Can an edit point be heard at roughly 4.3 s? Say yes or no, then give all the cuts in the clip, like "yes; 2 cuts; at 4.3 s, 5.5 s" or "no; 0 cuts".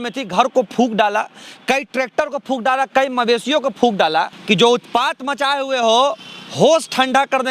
yes; 1 cut; at 4.3 s